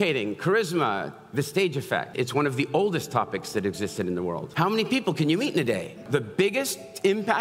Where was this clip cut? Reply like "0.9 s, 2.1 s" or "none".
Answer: 2.1 s, 4.4 s, 6.1 s

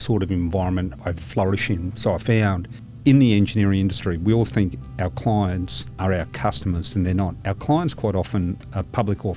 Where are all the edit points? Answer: 1.0 s, 3.0 s, 5.9 s

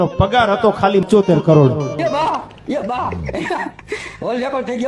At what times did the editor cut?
1.1 s, 2.0 s

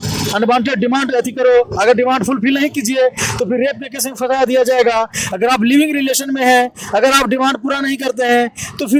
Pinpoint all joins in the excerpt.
none

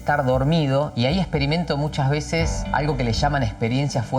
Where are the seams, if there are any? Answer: 0.9 s, 2.6 s

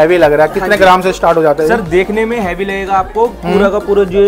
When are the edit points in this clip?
none

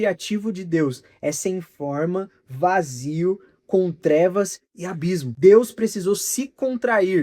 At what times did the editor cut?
5.3 s

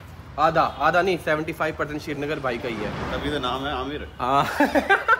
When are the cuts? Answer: none

